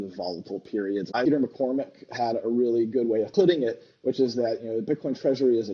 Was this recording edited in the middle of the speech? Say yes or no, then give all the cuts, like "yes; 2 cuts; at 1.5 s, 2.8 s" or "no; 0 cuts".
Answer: yes; 2 cuts; at 1.2 s, 3.3 s